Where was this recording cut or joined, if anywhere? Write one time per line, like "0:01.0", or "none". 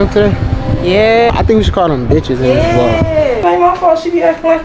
0:01.3
0:03.4